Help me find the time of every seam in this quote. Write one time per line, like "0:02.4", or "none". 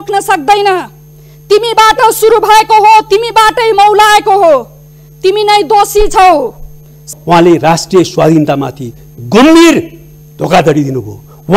0:07.1